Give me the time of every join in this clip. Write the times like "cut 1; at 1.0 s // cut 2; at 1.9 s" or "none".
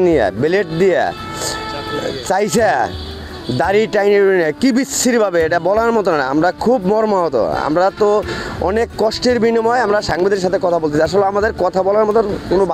none